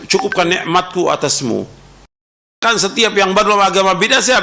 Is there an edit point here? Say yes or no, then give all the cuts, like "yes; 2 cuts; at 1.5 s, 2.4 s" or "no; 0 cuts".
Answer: yes; 1 cut; at 2.4 s